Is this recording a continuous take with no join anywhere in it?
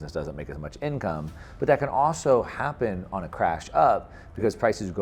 no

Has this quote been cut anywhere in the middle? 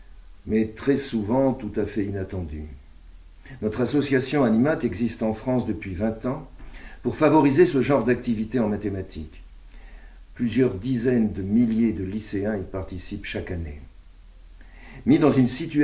no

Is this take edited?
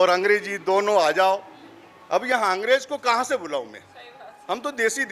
no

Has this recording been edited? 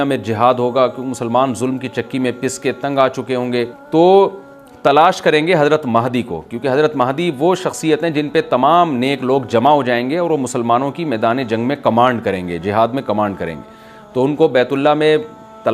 yes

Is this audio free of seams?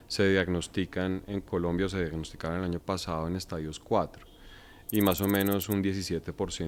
yes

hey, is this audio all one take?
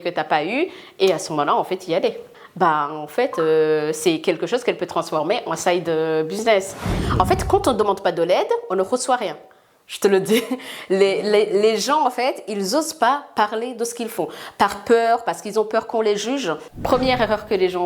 no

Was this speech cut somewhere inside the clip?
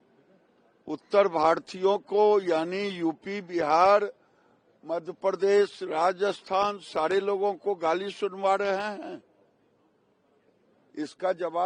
no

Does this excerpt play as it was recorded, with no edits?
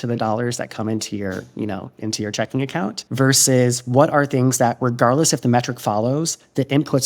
no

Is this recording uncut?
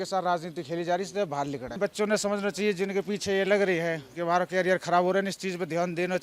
yes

